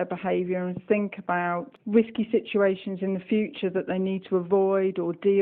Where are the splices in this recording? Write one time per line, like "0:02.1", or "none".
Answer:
0:01.7